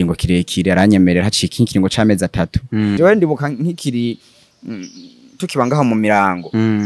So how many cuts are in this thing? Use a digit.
1